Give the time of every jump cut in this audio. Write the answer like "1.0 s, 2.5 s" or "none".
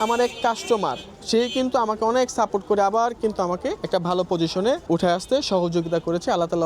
3.8 s, 4.8 s